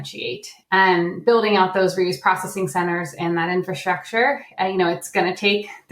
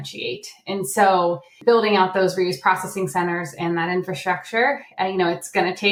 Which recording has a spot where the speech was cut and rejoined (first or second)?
first